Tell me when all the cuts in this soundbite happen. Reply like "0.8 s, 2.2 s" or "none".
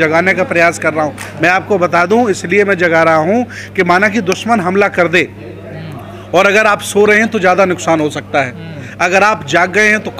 none